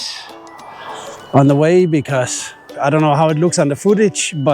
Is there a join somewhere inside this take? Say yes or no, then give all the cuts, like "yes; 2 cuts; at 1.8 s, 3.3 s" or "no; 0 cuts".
yes; 1 cut; at 2.7 s